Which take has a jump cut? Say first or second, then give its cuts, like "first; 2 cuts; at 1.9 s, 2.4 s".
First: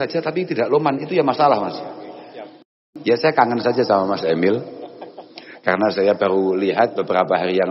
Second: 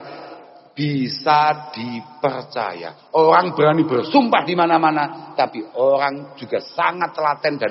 first; 1 cut; at 2.8 s